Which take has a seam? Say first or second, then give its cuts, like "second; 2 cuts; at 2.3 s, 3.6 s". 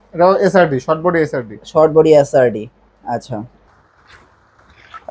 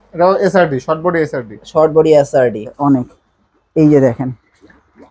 second; 1 cut; at 2.7 s